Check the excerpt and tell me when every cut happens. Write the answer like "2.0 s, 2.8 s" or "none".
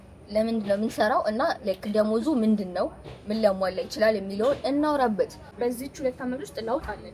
5.4 s